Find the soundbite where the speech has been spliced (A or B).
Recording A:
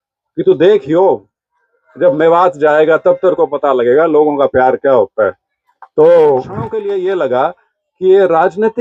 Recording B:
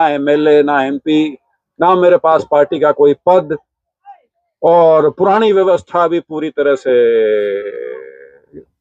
A